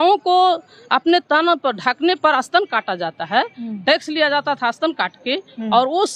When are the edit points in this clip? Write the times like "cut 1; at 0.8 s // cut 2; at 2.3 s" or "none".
none